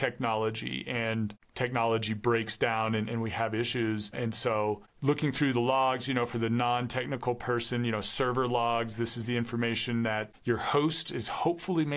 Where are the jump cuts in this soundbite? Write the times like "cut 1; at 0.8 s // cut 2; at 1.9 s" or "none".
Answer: cut 1; at 1.4 s // cut 2; at 4.9 s